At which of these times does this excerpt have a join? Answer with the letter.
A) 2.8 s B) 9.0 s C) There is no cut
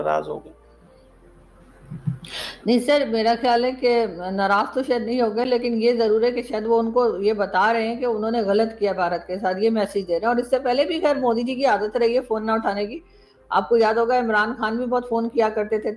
C